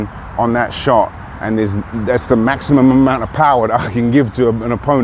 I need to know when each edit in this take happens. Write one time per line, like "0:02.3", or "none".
none